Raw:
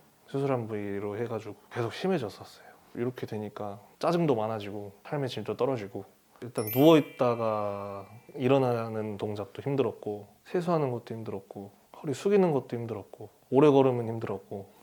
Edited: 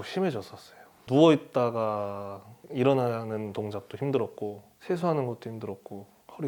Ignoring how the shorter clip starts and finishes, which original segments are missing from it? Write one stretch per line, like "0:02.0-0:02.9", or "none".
0:02.9-0:06.7

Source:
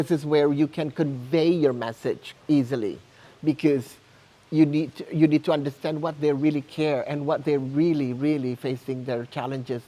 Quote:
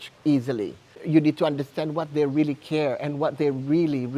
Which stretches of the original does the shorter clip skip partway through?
0:03.2-0:05.0

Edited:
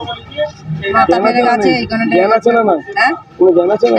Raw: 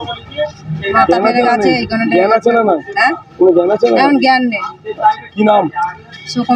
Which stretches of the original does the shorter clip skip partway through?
none

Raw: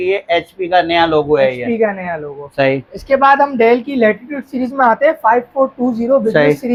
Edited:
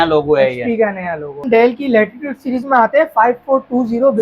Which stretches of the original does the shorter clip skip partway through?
0:02.5-0:03.5

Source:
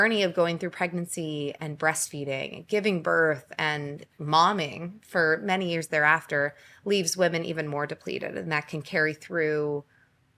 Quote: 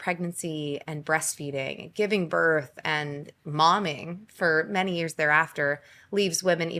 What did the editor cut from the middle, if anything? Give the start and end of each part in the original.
none

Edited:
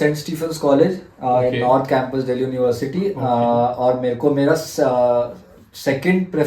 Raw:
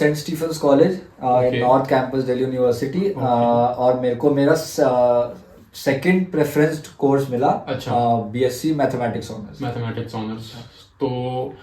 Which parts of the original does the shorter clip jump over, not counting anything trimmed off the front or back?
none

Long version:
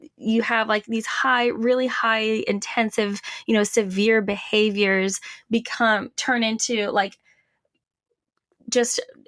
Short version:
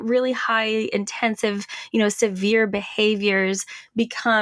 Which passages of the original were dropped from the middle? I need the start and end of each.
none

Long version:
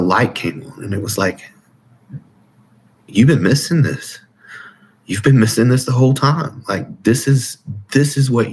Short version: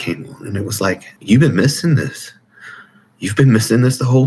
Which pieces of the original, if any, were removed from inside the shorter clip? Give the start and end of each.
0:01.5-0:03.0

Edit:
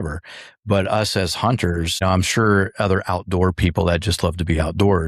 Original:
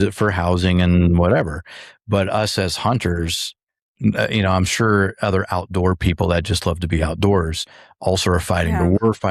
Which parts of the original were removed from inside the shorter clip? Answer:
0:03.4-0:04.4

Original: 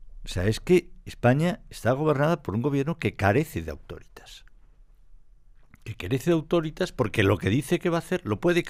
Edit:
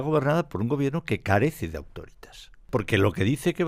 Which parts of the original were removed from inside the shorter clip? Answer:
0:04.6-0:06.9

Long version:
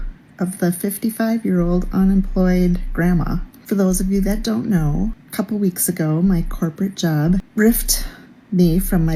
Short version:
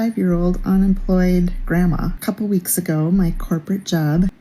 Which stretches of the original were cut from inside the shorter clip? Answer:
0:03.4-0:05.2

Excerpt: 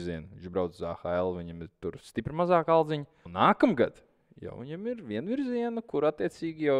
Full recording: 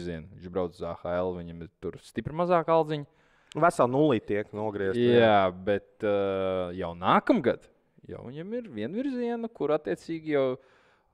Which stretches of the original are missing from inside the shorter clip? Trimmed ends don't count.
0:03.2-0:06.9

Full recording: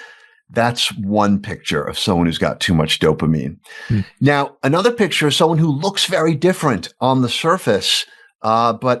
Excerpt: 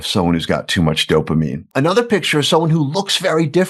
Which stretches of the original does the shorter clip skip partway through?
0:03.6-0:04.5

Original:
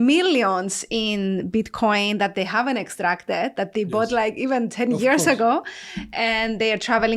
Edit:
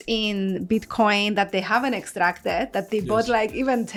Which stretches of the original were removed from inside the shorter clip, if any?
none

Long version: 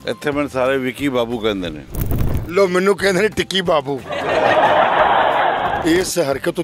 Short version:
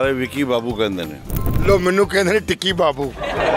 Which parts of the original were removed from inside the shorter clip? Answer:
0:02.2-0:02.4

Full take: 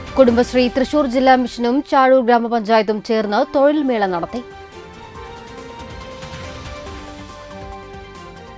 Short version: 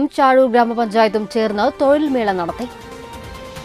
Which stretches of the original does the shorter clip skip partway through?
0:04.4-0:05.4

